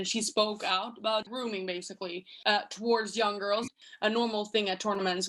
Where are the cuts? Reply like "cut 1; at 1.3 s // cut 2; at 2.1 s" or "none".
cut 1; at 1.9 s // cut 2; at 3.7 s